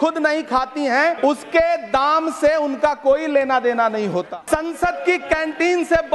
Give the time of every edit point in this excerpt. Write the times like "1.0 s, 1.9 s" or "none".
1.2 s, 4.3 s